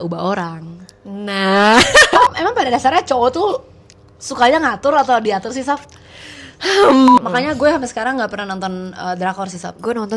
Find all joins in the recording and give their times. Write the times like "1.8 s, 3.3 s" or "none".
2.3 s, 7.2 s